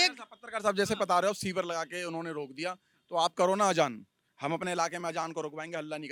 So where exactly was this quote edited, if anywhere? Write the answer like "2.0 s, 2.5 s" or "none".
none